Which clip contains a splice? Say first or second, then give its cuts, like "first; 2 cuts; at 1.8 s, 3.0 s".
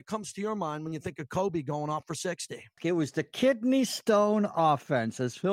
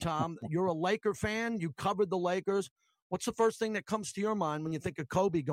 first; 1 cut; at 2.8 s